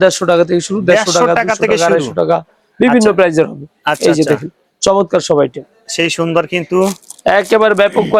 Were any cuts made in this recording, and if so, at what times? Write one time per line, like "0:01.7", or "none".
none